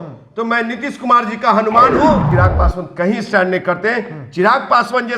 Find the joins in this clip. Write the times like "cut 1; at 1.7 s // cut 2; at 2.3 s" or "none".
cut 1; at 2.3 s